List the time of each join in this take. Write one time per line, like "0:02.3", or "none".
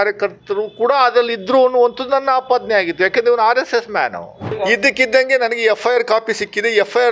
0:04.5